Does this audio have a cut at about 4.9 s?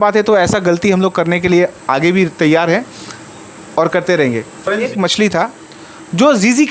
yes; 1 cut; at 4.9 s

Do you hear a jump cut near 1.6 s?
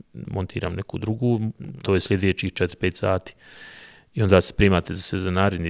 yes; 1 cut; at 1.6 s

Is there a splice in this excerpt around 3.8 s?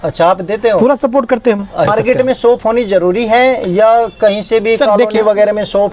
no; 1 cut; at 1.9 s

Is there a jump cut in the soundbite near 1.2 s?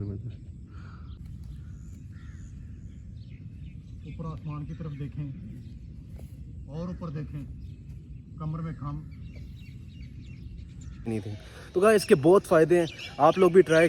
yes; 2 cuts; at 1.2 s, 11.1 s

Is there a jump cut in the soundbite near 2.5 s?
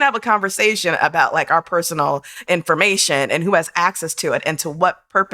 yes; 1 cut; at 2.5 s

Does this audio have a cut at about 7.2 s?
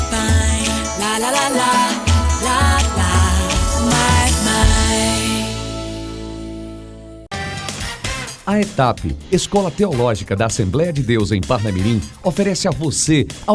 yes; 1 cut; at 7.2 s

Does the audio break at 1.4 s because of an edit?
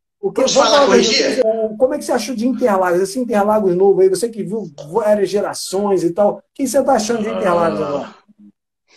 yes; 1 cut; at 1.4 s

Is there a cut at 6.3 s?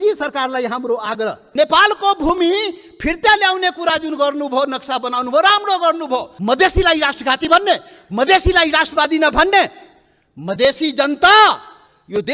yes; 2 cuts; at 1.4 s, 6.3 s

